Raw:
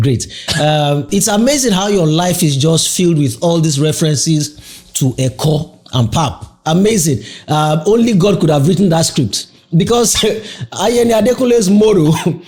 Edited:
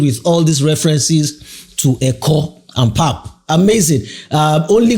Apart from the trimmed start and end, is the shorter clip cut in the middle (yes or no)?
no